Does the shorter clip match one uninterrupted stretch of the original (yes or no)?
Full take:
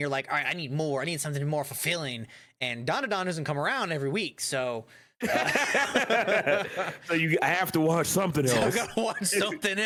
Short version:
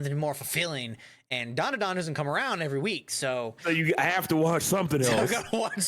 no